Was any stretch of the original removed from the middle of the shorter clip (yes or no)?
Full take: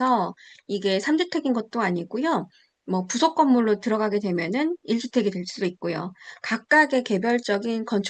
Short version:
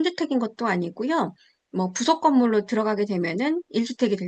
no